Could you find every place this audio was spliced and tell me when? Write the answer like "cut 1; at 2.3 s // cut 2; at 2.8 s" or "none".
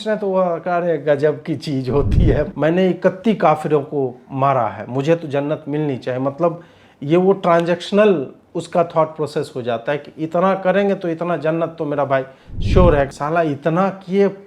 cut 1; at 2.5 s // cut 2; at 13.1 s